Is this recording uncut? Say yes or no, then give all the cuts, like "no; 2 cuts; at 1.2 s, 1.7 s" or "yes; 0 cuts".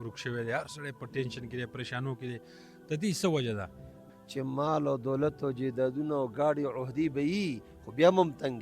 no; 1 cut; at 4.0 s